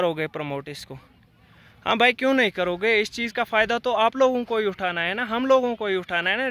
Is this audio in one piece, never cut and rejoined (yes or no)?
yes